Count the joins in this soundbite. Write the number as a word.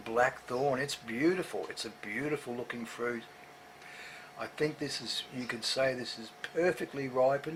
zero